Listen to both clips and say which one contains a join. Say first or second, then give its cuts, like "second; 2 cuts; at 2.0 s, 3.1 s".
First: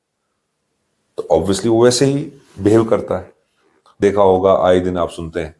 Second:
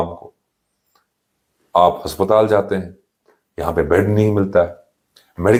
first; 1 cut; at 4.0 s